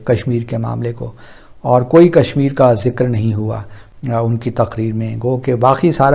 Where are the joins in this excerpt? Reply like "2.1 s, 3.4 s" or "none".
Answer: none

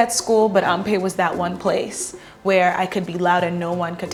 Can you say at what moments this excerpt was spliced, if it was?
none

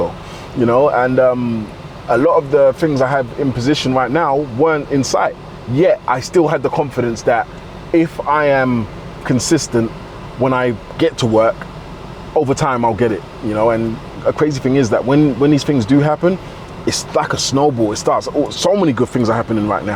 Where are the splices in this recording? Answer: 14.2 s

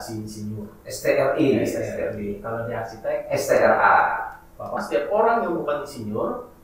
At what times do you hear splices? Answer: 4.8 s

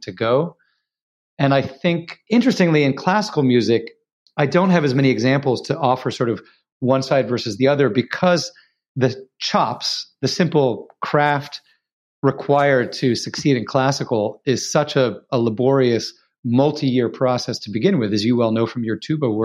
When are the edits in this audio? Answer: 2.1 s, 8.9 s

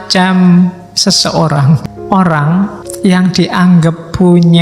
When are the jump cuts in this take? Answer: 1.8 s, 2.8 s

